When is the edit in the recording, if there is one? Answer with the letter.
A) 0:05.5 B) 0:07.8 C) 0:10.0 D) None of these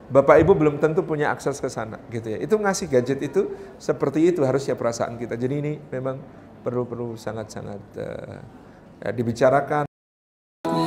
C